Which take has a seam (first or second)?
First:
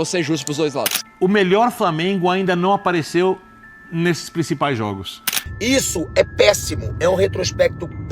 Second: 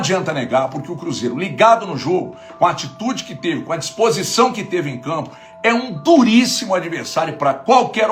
first